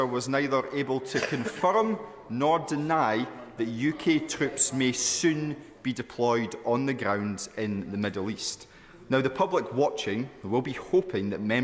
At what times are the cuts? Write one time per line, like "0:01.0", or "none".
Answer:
none